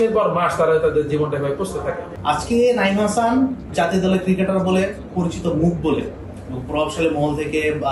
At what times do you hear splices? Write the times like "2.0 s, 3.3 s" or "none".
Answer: 2.1 s, 3.7 s, 5.1 s